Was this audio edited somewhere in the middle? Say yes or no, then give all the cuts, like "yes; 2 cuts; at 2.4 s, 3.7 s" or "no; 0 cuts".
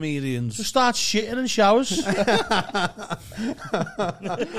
no; 0 cuts